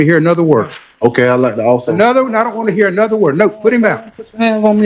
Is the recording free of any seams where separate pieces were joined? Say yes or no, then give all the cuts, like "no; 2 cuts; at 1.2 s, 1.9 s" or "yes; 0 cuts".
yes; 0 cuts